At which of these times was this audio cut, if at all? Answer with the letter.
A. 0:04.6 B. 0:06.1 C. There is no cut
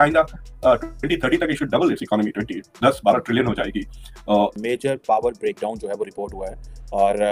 A